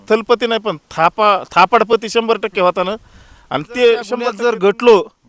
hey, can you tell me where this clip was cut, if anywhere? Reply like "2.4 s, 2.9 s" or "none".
4.3 s